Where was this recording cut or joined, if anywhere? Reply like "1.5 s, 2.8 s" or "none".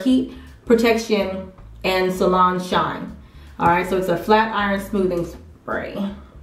5.5 s